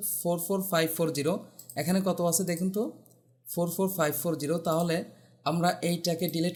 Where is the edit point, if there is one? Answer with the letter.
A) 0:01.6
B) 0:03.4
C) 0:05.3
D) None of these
D